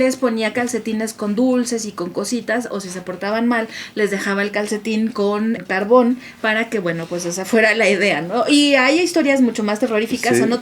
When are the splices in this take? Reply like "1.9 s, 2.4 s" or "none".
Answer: 5.6 s